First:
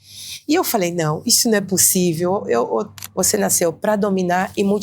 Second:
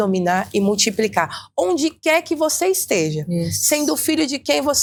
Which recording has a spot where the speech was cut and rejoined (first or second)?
first